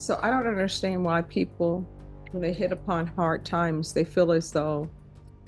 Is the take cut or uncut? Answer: uncut